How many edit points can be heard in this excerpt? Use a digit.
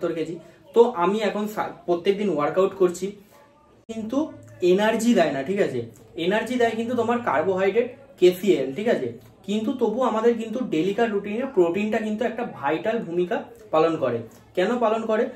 1